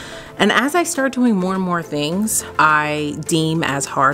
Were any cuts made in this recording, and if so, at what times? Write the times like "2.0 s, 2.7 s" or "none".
2.4 s